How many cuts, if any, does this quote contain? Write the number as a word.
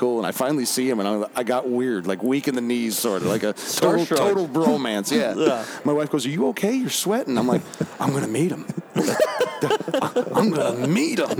zero